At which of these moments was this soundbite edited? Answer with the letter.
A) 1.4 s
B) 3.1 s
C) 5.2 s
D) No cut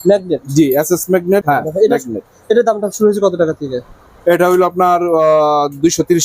A